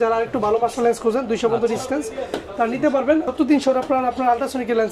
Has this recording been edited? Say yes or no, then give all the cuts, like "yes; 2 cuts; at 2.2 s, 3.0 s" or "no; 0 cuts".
yes; 1 cut; at 3.3 s